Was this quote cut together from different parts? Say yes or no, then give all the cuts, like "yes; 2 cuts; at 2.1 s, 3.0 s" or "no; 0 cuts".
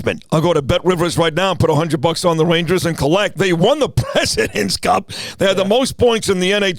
yes; 1 cut; at 3.3 s